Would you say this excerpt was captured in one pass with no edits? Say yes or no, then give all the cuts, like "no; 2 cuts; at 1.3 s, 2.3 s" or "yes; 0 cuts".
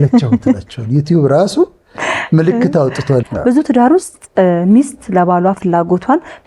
no; 1 cut; at 3.3 s